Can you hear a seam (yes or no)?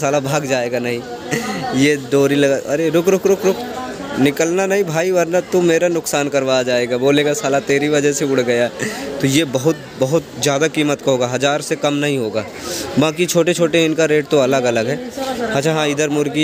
no